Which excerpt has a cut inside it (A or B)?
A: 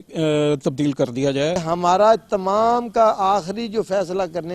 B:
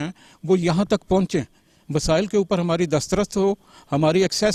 A